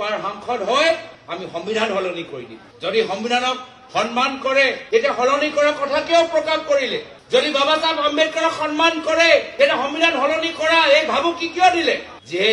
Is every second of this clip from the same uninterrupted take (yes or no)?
yes